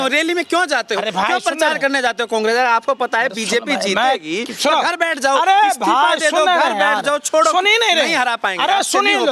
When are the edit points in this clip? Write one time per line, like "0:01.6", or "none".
none